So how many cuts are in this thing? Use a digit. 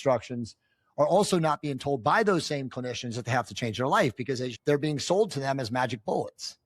1